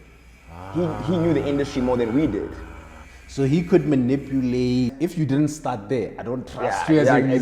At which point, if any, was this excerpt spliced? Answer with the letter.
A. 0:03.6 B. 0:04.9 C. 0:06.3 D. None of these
B